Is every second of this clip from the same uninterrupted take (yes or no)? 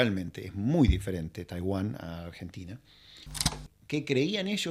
no